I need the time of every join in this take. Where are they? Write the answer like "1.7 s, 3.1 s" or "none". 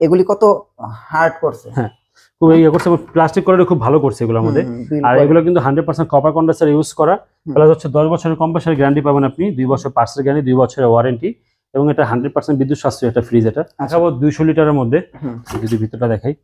13.9 s